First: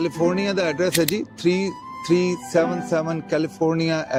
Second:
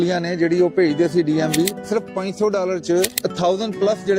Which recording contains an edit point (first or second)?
second